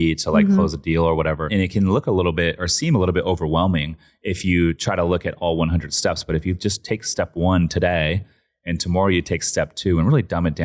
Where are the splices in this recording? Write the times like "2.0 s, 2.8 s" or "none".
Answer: 1.5 s

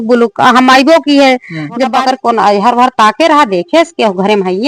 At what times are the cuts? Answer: 1.9 s

